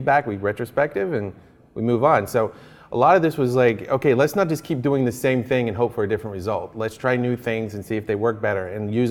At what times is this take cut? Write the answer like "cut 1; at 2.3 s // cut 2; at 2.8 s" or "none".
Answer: none